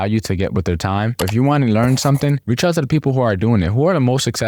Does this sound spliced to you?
yes; 1 cut; at 1.2 s

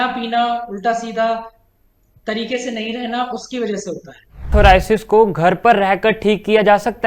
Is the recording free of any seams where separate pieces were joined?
no; 1 cut; at 4.5 s

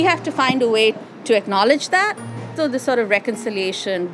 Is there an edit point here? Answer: yes; 2 cuts; at 1.1 s, 2.5 s

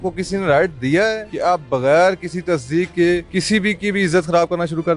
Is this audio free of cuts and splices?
no; 2 cuts; at 1.3 s, 3.3 s

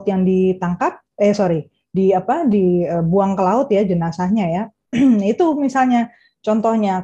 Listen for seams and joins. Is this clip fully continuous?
yes; 0 cuts

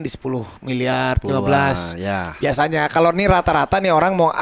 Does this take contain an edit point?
no; 0 cuts

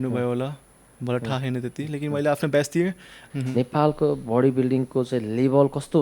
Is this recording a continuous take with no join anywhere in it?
no; 1 cut; at 3.2 s

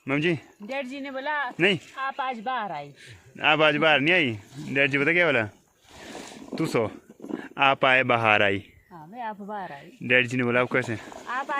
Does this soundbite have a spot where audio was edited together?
no; 0 cuts

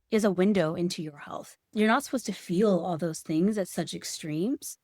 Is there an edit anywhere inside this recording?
yes; 1 cut; at 1.7 s

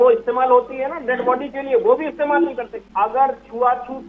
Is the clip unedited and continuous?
no; 1 cut; at 2.7 s

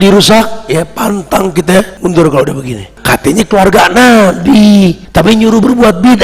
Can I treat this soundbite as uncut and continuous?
no; 3 cuts; at 1.9 s, 2.9 s, 5.0 s

